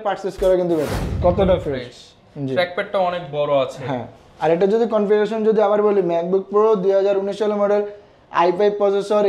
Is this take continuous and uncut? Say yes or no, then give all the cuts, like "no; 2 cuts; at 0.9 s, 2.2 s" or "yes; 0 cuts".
no; 1 cut; at 1.2 s